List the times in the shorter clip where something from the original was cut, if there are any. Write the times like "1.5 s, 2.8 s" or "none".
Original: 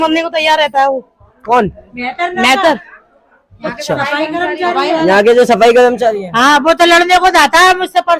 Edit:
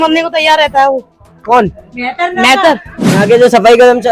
3.2 s